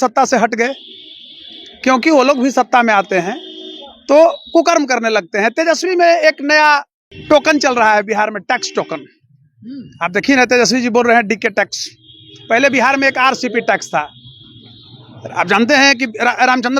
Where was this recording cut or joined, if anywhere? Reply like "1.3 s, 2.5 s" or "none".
7.1 s